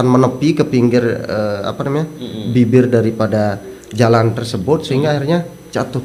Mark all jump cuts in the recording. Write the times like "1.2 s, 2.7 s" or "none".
none